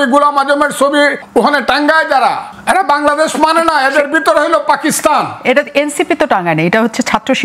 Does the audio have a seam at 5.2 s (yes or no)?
no